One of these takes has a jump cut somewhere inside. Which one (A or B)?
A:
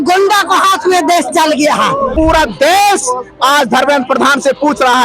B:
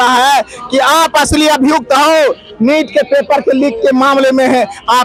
A